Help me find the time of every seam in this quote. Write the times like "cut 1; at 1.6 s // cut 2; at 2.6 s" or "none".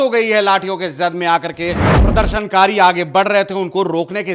cut 1; at 1.9 s